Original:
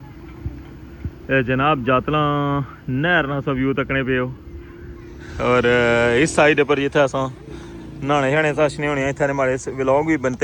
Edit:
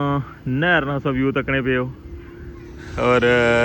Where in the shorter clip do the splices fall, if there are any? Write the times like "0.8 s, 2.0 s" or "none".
none